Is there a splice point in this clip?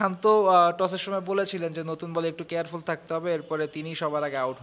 no; 0 cuts

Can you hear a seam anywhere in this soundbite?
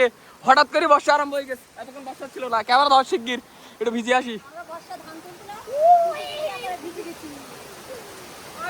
no; 0 cuts

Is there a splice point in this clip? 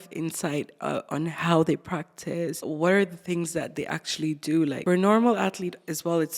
yes; 2 cuts; at 2.6 s, 4.8 s

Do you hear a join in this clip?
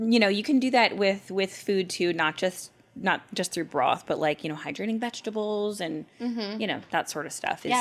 no; 0 cuts

